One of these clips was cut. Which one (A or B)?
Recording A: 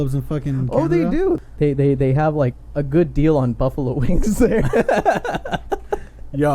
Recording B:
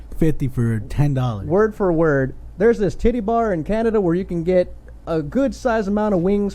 A